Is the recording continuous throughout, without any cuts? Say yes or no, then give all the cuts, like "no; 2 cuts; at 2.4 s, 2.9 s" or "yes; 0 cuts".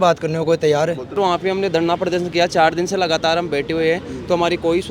no; 1 cut; at 1.2 s